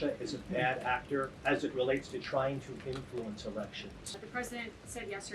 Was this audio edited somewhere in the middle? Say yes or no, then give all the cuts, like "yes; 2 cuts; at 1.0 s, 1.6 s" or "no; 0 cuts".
yes; 2 cuts; at 1.3 s, 4.2 s